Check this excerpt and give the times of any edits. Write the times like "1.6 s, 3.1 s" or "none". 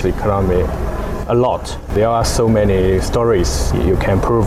1.8 s